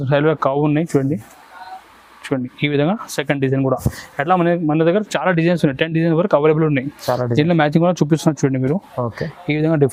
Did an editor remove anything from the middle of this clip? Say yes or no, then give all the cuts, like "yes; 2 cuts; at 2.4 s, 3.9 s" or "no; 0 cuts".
no; 0 cuts